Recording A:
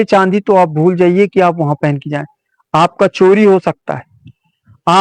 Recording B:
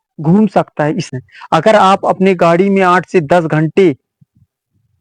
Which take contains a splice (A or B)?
B